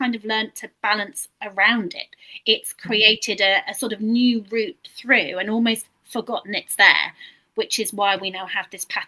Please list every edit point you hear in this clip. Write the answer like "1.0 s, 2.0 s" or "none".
none

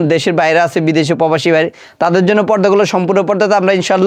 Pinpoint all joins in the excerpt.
none

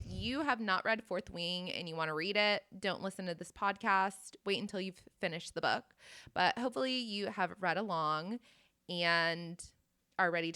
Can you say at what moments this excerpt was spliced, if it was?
none

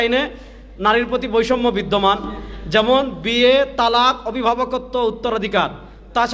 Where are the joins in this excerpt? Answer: none

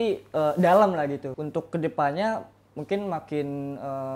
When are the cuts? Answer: 1.2 s

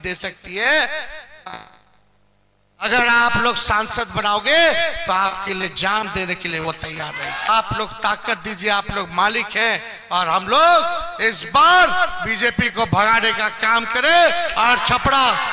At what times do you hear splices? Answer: 7.5 s

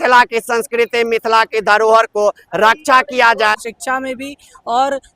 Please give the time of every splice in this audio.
3.5 s

